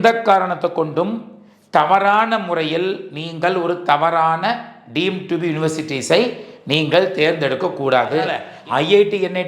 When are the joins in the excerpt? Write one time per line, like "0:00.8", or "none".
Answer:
0:08.5